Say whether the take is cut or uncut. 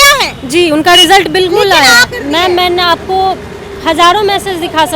cut